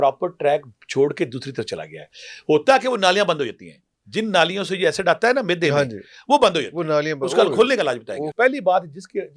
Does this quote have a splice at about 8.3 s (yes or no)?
yes